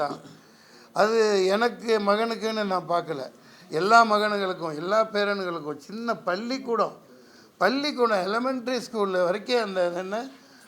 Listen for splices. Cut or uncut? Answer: uncut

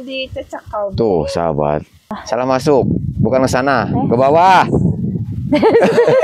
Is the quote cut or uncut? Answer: cut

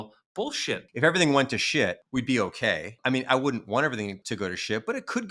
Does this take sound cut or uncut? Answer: cut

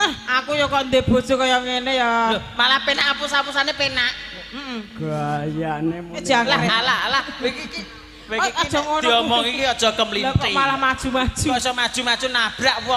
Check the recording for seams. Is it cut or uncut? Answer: uncut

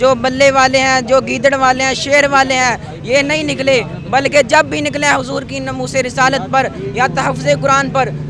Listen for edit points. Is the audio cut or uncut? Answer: uncut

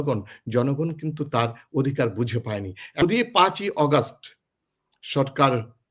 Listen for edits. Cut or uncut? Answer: cut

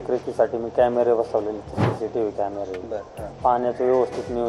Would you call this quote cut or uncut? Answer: uncut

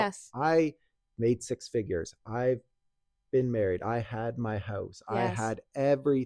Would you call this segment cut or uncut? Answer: uncut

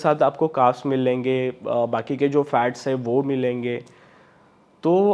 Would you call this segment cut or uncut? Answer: uncut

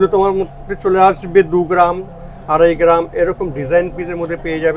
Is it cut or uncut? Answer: uncut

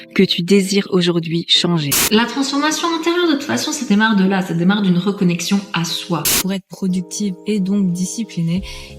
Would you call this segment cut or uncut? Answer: cut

